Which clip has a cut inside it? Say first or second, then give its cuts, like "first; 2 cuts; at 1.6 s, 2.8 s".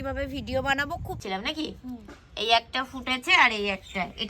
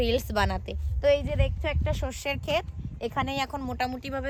first; 1 cut; at 1.2 s